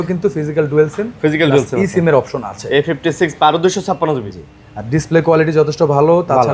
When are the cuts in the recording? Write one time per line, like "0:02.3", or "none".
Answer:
none